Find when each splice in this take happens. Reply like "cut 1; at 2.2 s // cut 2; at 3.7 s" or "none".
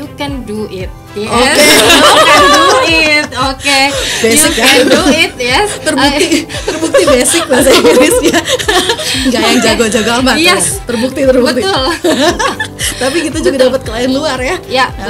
none